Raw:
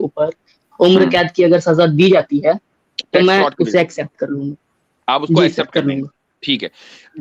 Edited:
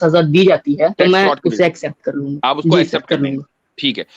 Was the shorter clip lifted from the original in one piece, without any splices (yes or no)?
no